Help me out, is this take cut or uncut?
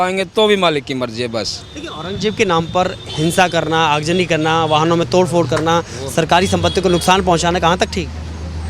uncut